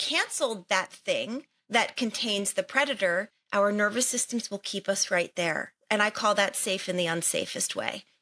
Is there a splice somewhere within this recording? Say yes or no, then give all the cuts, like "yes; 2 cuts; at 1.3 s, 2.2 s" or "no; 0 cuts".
yes; 2 cuts; at 3.4 s, 5.7 s